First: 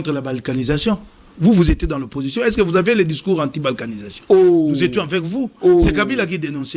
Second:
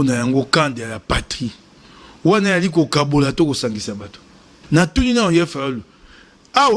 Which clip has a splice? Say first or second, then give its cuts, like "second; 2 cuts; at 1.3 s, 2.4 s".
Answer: second; 1 cut; at 4.6 s